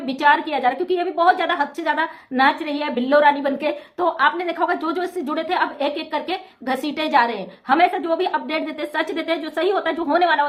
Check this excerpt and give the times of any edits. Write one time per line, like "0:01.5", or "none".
none